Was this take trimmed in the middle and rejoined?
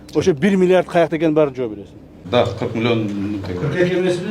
yes; 1 cut; at 2.2 s

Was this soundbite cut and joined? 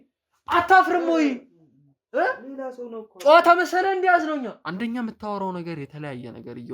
yes; 1 cut; at 4.6 s

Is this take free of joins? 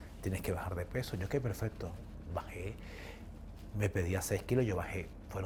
yes; 0 cuts

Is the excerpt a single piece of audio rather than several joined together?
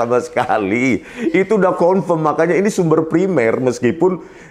yes; 0 cuts

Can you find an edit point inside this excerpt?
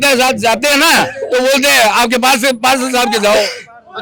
no; 0 cuts

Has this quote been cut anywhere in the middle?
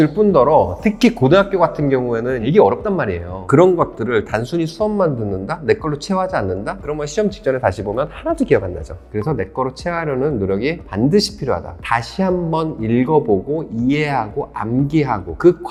no; 0 cuts

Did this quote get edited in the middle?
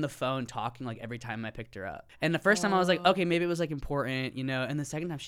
yes; 1 cut; at 2.1 s

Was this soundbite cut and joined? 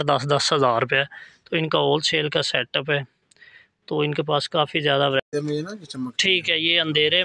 yes; 1 cut; at 5.3 s

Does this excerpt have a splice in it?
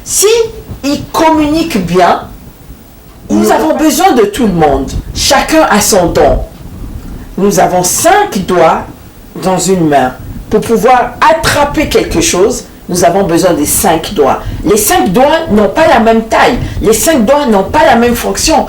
yes; 1 cut; at 3.5 s

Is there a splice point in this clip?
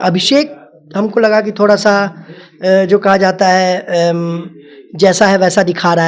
no; 0 cuts

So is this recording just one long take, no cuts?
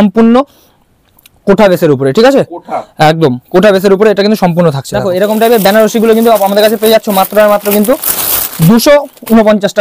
no; 1 cut; at 4.9 s

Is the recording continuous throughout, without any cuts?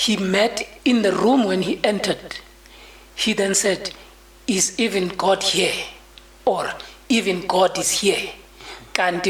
yes; 0 cuts

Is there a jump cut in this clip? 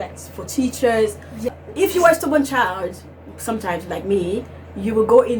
yes; 1 cut; at 1.5 s

